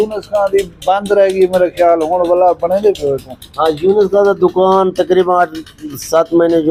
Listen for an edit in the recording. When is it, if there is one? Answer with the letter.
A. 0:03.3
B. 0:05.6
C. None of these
C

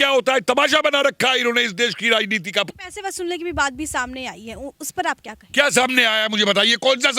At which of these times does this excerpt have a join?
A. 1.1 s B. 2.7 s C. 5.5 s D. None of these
B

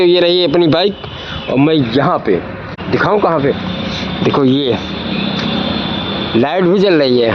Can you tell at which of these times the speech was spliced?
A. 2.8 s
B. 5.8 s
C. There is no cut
A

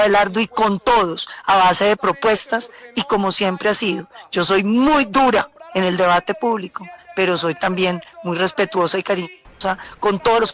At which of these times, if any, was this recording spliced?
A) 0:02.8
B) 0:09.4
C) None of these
B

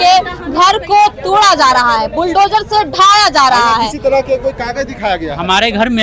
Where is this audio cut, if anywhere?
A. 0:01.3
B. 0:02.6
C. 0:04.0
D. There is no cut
D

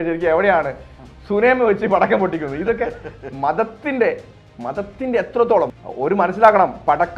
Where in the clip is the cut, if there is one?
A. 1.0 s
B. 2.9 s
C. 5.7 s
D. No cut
C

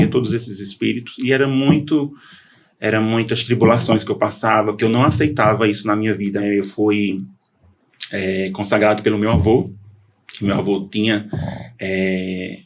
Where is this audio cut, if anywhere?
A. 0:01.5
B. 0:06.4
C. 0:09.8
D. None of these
B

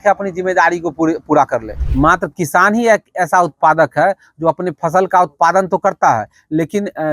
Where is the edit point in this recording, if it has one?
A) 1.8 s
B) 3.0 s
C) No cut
A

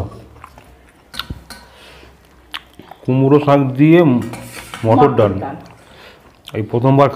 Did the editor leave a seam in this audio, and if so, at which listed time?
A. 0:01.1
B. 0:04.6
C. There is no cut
A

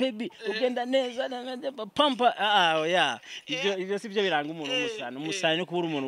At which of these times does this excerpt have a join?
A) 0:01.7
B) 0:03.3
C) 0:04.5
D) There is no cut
D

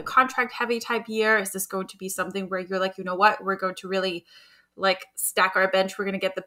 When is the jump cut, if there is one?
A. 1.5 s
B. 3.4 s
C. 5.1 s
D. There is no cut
D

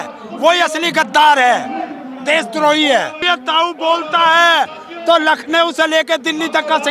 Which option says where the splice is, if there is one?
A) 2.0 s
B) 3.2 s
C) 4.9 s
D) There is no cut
B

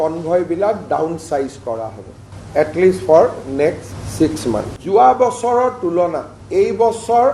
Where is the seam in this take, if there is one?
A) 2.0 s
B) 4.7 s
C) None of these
C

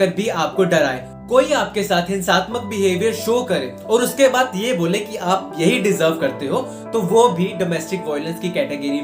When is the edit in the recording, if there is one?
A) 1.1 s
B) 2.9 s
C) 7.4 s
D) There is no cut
A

